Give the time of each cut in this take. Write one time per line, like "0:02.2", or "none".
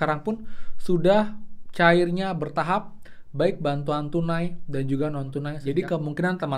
0:05.6

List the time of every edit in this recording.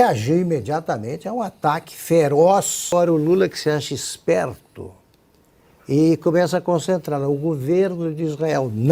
0:02.9

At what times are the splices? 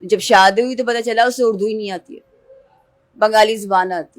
none

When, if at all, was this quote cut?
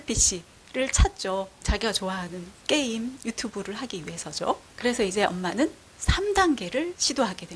none

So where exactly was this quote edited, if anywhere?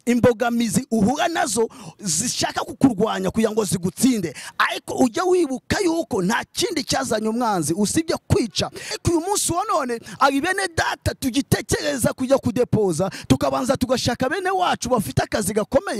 0:09.0

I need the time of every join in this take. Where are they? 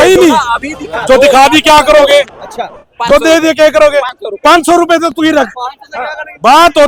none

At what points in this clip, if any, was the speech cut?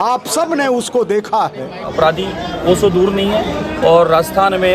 0:01.9

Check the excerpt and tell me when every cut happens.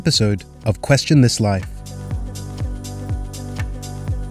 0:01.8

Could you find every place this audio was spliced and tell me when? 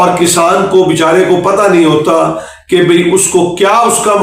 none

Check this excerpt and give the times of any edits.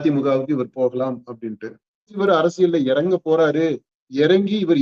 0:02.1

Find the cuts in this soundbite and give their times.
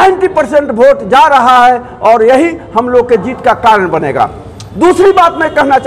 none

